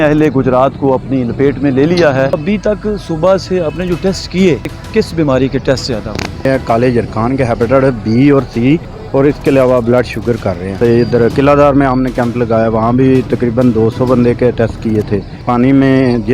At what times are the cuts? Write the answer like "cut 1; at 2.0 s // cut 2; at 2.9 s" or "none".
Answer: cut 1; at 2.4 s // cut 2; at 4.8 s // cut 3; at 6.5 s // cut 4; at 8.9 s // cut 5; at 10.8 s // cut 6; at 15.4 s